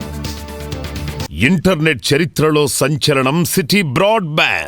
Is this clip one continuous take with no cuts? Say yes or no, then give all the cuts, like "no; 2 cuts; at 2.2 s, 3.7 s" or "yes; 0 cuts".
no; 1 cut; at 1.3 s